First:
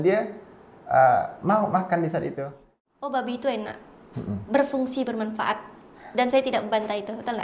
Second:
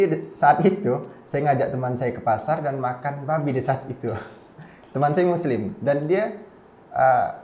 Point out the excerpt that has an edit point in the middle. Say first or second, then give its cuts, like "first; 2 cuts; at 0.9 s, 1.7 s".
first; 1 cut; at 2.7 s